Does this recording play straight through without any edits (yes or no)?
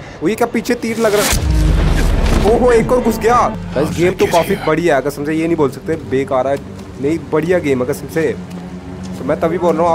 no